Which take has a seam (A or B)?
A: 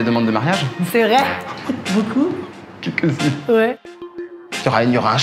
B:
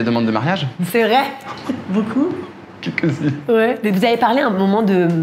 A